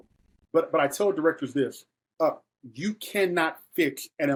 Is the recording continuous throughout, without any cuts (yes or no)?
yes